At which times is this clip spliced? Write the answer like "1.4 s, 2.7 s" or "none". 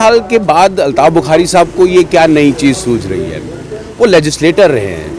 none